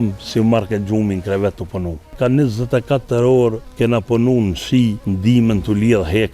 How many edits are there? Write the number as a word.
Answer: three